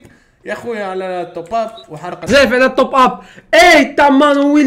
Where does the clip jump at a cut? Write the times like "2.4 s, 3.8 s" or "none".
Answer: 2.3 s

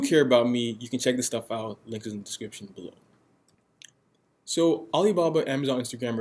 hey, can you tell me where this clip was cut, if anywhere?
3.6 s

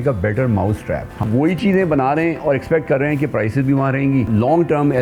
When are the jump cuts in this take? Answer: 1.1 s, 4.3 s

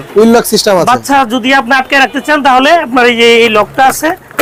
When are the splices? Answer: none

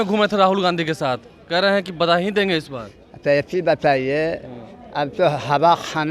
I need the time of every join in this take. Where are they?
none

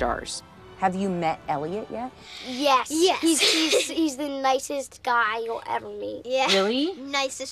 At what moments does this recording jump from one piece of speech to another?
4.2 s

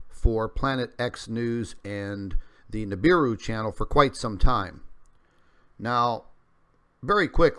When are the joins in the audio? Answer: 2.8 s

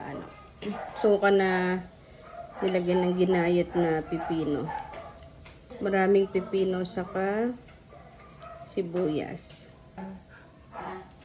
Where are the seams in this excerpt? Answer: 5.7 s, 10.3 s

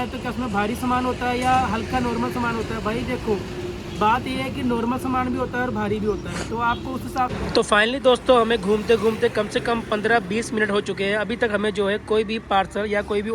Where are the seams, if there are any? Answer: 7.3 s

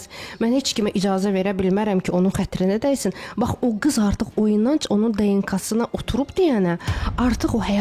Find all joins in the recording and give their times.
none

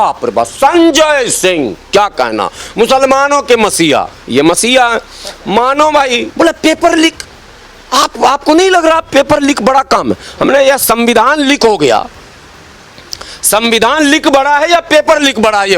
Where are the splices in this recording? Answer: 6.3 s

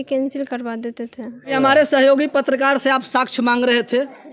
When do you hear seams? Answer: 1.5 s

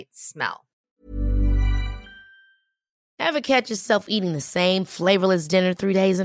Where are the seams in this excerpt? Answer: 1.0 s

